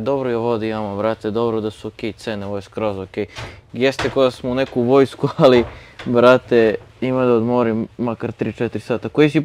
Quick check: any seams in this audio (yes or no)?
no